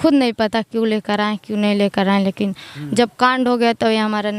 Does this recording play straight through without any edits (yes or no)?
no